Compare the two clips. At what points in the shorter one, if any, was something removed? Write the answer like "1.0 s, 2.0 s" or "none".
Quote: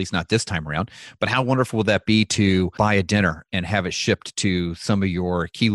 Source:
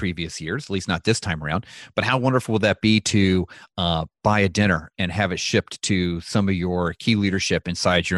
2.7 s